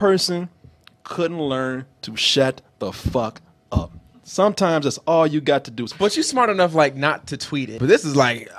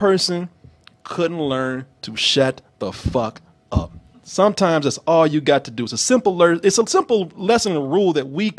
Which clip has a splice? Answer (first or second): first